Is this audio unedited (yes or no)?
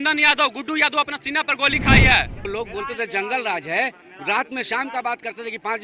no